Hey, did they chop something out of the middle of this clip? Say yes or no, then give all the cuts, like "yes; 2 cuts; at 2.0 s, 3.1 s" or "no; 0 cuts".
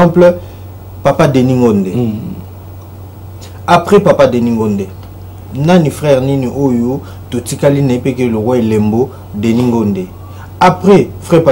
no; 0 cuts